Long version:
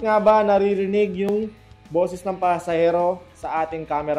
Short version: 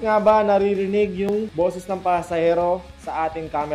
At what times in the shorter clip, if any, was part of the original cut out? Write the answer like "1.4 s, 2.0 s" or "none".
1.5 s